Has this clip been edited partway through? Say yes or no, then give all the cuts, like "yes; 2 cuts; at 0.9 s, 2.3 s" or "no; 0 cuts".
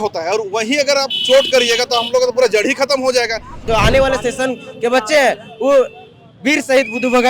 yes; 1 cut; at 3.6 s